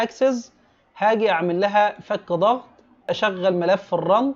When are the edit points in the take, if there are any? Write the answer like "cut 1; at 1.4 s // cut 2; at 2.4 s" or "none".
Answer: cut 1; at 3.1 s